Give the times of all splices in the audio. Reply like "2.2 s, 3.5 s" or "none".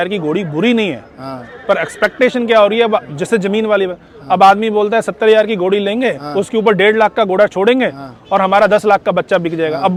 none